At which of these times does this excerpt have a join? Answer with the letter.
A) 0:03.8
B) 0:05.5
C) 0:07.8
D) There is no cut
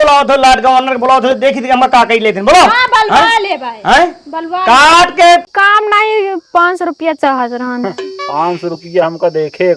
B